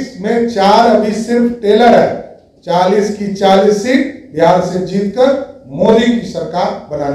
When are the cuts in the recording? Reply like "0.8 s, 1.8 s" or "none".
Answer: none